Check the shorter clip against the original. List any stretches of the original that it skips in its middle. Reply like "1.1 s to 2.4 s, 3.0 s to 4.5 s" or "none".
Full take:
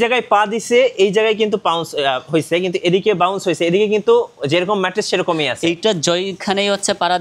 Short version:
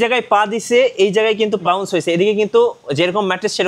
1.6 s to 3.2 s